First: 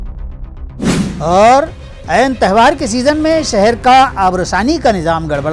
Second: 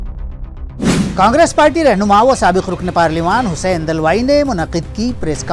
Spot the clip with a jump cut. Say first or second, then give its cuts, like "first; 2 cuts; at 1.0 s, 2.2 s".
first; 1 cut; at 1.1 s